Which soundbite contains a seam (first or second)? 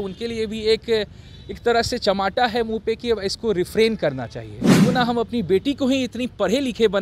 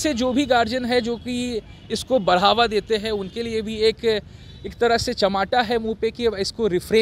first